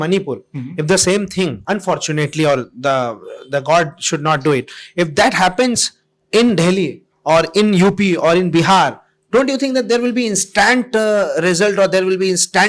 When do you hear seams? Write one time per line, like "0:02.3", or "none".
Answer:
none